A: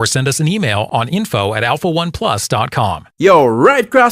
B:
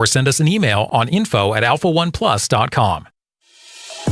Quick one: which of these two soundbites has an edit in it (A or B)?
A